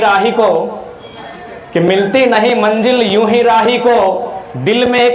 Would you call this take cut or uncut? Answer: uncut